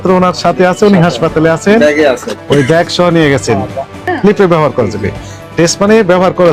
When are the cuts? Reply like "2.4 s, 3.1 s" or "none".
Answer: 4.0 s